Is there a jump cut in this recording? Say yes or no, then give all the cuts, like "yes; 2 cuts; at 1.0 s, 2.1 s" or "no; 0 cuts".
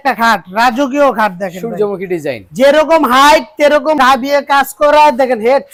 no; 0 cuts